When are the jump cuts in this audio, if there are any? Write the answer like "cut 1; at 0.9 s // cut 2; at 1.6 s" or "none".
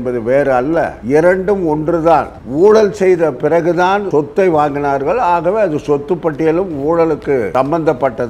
cut 1; at 4.1 s // cut 2; at 7.5 s